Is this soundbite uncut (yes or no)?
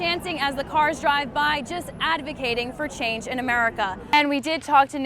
no